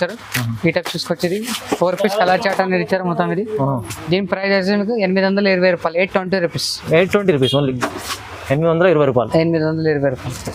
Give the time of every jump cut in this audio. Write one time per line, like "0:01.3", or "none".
none